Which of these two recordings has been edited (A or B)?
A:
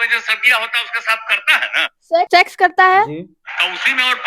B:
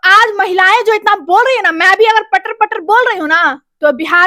A